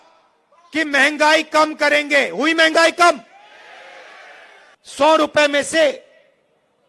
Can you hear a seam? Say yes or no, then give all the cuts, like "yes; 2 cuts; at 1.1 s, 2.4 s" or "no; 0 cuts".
yes; 1 cut; at 4.7 s